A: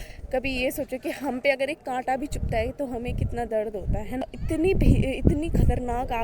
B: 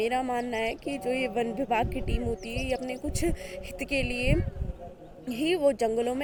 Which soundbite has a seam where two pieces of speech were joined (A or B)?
A